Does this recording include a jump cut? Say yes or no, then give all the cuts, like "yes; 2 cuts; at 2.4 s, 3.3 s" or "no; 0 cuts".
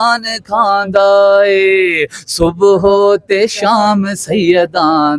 no; 0 cuts